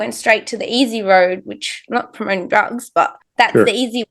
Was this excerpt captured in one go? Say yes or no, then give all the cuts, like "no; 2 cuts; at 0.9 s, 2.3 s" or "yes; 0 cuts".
no; 1 cut; at 3.2 s